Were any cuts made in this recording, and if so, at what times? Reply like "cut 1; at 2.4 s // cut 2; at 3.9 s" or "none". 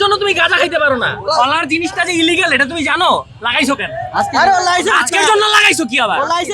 cut 1; at 1.3 s